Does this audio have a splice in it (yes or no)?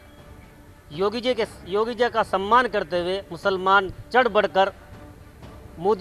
no